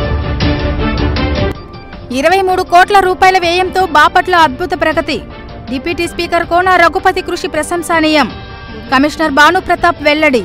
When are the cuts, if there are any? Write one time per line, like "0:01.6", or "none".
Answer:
0:01.5